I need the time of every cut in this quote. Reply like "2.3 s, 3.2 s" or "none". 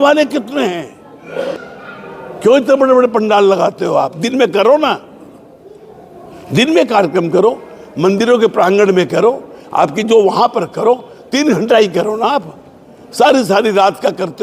1.7 s